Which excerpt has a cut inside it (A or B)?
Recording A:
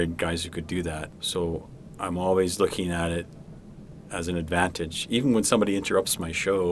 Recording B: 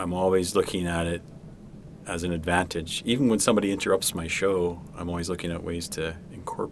A